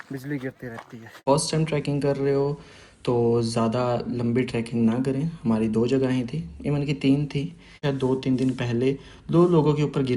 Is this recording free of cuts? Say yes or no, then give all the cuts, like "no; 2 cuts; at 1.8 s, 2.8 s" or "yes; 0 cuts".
no; 2 cuts; at 1.2 s, 7.8 s